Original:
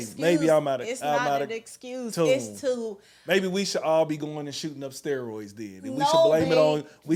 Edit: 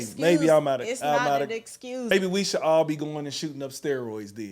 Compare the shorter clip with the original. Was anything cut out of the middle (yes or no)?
yes